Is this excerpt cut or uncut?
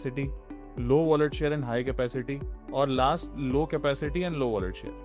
uncut